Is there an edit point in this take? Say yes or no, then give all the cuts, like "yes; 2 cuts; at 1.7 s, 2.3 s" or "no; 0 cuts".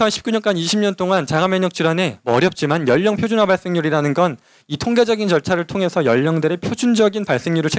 no; 0 cuts